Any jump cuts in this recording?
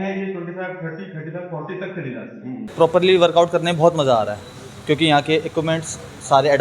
yes; 1 cut; at 2.6 s

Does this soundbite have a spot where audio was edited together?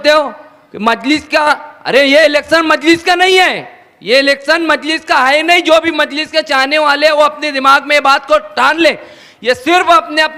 no; 0 cuts

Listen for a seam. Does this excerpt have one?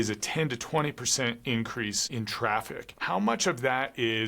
yes; 1 cut; at 2.9 s

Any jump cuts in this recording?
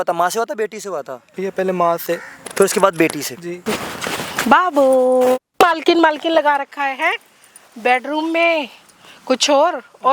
yes; 3 cuts; at 1.2 s, 3.6 s, 5.5 s

